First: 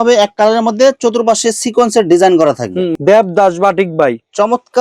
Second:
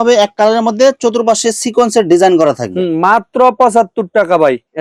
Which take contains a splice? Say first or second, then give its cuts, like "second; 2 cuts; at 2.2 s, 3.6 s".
first; 1 cut; at 3.0 s